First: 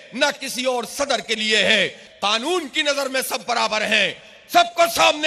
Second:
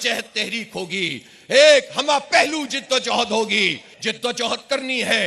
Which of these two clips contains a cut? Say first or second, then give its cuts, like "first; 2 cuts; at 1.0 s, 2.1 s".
second; 1 cut; at 3.9 s